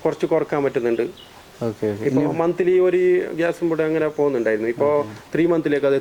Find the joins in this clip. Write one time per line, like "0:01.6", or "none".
none